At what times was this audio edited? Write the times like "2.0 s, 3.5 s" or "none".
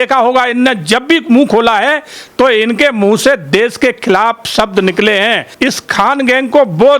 5.5 s